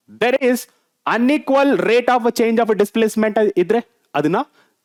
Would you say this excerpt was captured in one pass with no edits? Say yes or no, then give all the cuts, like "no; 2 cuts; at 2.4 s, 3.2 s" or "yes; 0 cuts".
yes; 0 cuts